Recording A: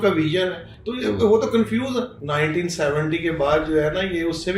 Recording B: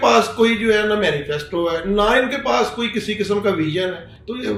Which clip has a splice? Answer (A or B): A